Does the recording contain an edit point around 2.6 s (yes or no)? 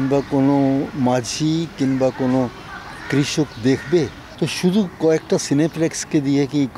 no